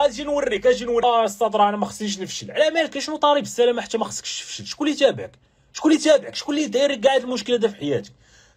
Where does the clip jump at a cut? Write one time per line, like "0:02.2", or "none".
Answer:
0:01.0

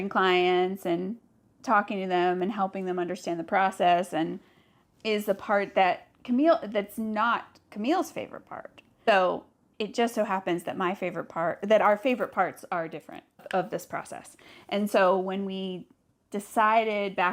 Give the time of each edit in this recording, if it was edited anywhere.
none

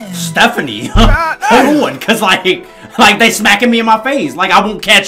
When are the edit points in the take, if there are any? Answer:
none

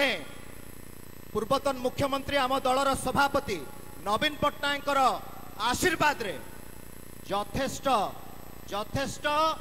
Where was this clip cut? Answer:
none

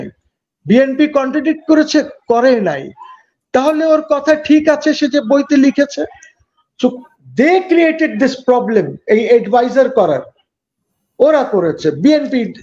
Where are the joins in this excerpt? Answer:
none

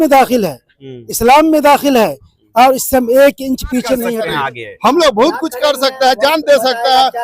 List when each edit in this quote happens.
0:04.1

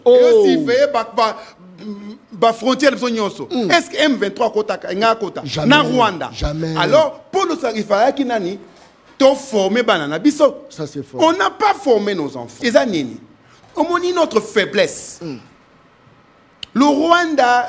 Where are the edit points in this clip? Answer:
0:12.5

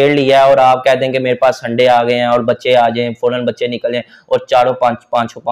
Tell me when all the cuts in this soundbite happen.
none

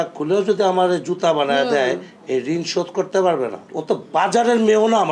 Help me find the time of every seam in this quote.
0:03.7

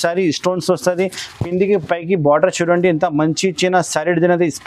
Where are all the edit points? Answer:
none

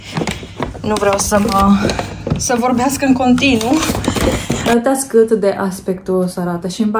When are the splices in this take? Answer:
0:04.5

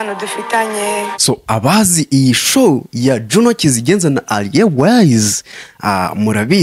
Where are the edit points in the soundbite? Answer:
0:01.1

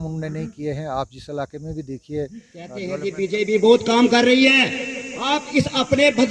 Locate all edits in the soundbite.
0:02.9

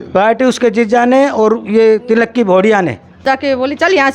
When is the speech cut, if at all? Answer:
0:03.2

